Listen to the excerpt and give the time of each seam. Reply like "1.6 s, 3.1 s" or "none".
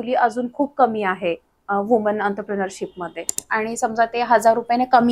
3.3 s